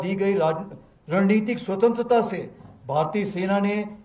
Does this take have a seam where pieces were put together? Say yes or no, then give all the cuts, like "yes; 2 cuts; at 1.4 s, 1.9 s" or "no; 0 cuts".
no; 0 cuts